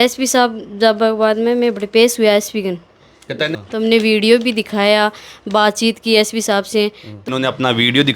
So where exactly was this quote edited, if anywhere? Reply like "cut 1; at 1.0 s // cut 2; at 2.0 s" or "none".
cut 1; at 3.4 s // cut 2; at 7.3 s

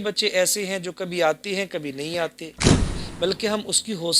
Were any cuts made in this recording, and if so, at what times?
cut 1; at 2.9 s

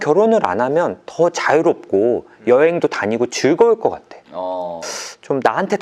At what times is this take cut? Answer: cut 1; at 4.8 s

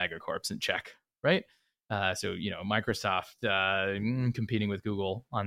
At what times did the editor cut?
none

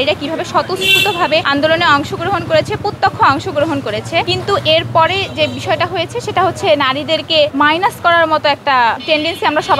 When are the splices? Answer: cut 1; at 1.5 s // cut 2; at 4.3 s // cut 3; at 7.5 s // cut 4; at 9.0 s

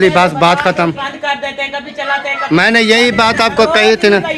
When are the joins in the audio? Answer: cut 1; at 1.0 s

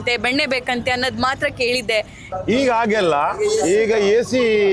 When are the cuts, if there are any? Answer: cut 1; at 2.3 s

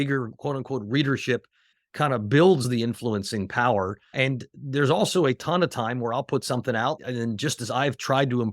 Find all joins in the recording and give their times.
cut 1; at 1.8 s // cut 2; at 2.7 s // cut 3; at 4.1 s // cut 4; at 7.0 s

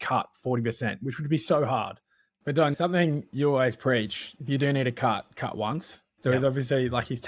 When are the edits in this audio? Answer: cut 1; at 2.7 s // cut 2; at 6.0 s

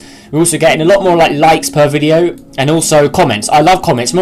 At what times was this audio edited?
none

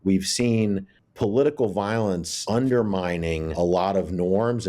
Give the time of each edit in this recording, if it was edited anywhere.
cut 1; at 1.0 s // cut 2; at 2.3 s // cut 3; at 3.5 s

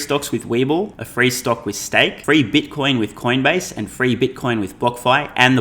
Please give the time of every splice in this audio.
cut 1; at 1.0 s // cut 2; at 2.2 s

